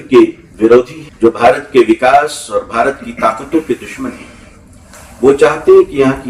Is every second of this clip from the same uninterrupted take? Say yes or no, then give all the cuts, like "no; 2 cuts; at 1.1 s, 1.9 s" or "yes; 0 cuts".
no; 1 cut; at 1.0 s